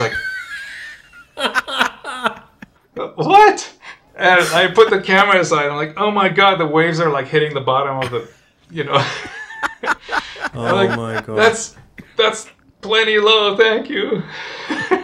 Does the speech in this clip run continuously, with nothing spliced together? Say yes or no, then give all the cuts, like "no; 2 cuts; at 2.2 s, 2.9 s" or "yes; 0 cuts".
yes; 0 cuts